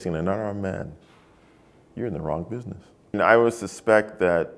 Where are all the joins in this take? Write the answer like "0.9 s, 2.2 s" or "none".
3.1 s